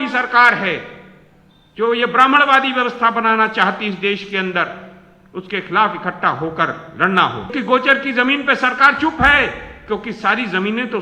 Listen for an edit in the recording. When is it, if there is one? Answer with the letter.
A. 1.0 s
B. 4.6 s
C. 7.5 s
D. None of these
C